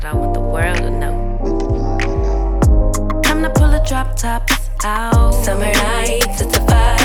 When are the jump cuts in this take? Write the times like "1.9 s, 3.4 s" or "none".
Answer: none